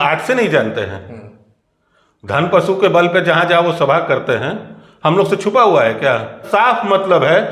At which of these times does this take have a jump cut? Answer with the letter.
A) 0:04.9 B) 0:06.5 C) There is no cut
B